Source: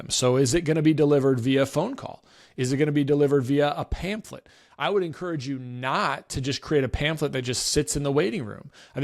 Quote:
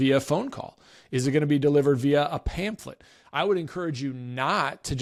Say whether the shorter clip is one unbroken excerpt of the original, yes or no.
yes